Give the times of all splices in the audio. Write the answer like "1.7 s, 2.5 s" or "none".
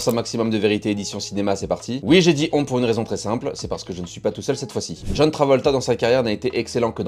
none